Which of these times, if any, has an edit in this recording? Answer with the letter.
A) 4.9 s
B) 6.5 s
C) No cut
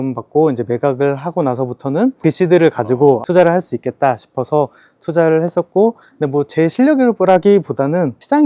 C